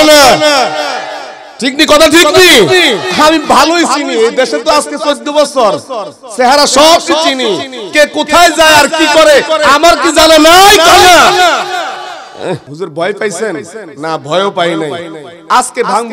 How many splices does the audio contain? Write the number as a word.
one